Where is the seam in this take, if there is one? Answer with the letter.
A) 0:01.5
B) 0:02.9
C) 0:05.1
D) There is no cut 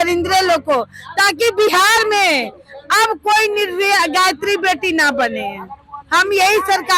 D